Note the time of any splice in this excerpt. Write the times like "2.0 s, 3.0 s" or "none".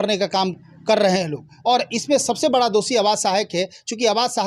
none